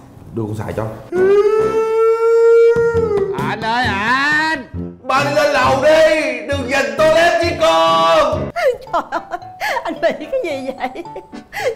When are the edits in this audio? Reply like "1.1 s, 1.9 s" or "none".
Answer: 1.0 s, 8.5 s